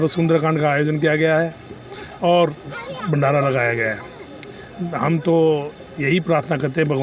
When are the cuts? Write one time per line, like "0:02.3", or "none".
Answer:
none